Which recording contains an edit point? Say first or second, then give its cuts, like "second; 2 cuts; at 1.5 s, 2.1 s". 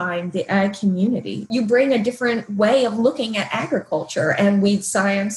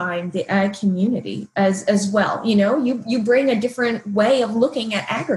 first; 1 cut; at 1.5 s